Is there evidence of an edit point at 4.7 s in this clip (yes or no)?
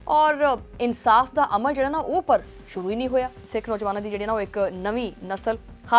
no